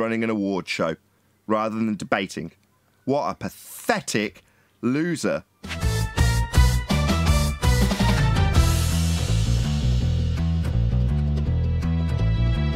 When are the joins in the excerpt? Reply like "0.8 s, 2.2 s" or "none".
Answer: 5.8 s